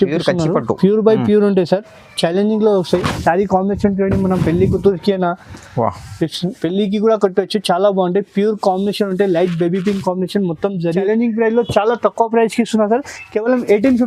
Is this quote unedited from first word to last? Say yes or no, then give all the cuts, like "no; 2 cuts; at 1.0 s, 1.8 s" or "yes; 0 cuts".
no; 1 cut; at 11.0 s